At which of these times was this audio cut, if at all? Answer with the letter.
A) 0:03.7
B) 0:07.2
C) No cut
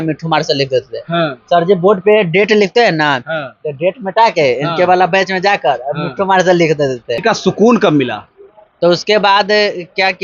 B